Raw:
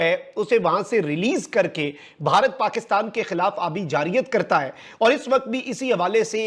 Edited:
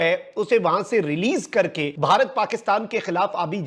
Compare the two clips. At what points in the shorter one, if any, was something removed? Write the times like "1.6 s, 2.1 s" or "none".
1.9 s